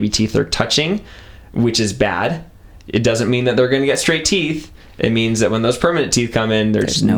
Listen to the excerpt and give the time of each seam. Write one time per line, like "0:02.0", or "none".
none